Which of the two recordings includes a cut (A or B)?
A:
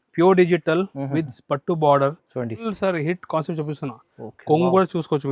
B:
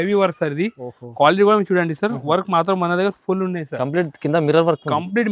A